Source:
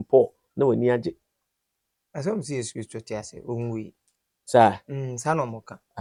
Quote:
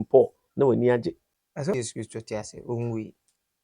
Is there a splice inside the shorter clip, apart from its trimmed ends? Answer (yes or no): yes